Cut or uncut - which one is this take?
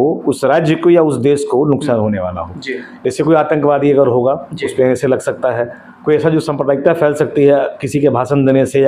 uncut